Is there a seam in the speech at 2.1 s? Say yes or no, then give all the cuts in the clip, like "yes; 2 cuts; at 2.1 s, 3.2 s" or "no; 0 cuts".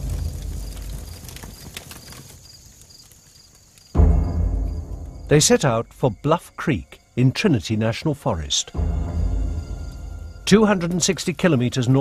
yes; 1 cut; at 2.1 s